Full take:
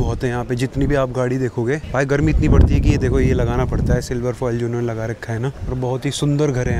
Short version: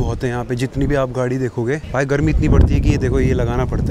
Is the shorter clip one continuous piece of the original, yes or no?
yes